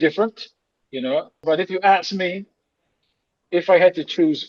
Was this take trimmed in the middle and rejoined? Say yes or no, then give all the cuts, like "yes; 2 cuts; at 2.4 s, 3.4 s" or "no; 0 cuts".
yes; 1 cut; at 1.3 s